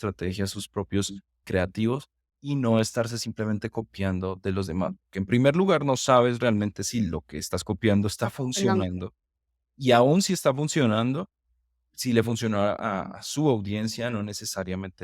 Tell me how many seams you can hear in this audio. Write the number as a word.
one